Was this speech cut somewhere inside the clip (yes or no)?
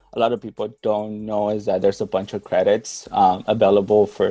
no